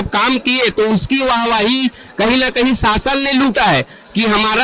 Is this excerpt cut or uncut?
uncut